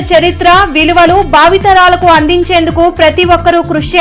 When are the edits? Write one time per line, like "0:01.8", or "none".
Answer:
none